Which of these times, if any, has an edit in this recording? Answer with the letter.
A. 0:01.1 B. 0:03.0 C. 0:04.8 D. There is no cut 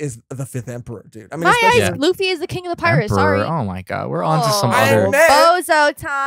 B